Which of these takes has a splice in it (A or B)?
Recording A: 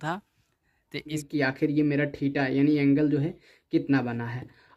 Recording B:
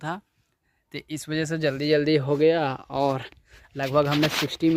A